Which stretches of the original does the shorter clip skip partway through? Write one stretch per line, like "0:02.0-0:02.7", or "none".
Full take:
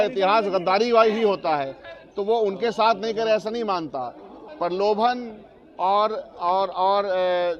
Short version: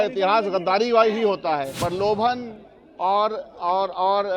0:01.7-0:04.5